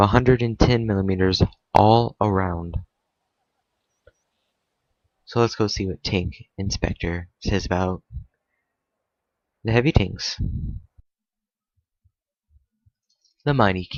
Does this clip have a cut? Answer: no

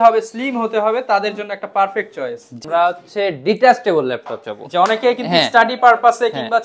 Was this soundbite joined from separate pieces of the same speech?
yes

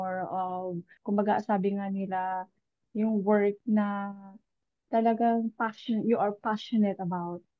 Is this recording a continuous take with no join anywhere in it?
yes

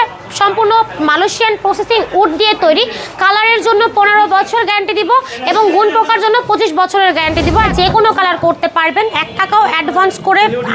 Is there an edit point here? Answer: yes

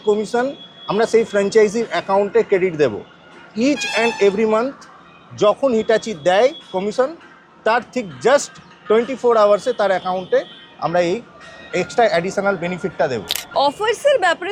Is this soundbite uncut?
yes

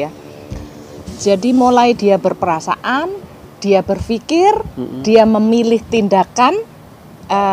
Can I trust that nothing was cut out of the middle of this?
yes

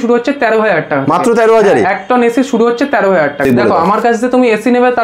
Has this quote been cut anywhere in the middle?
yes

